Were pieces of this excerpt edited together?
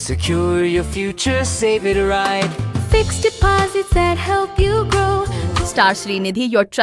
yes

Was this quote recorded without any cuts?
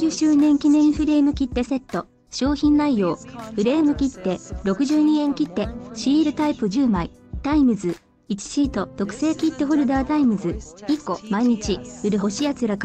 yes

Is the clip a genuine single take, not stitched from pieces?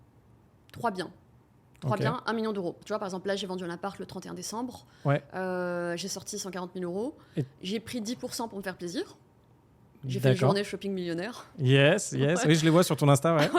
no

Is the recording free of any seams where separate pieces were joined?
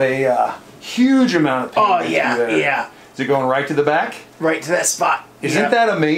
yes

